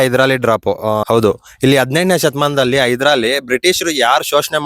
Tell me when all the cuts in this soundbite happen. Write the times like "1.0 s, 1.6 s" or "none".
1.0 s